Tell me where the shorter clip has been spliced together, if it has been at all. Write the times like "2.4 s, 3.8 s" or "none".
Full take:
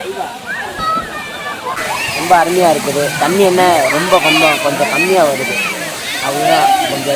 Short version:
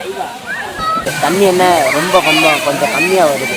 1.1 s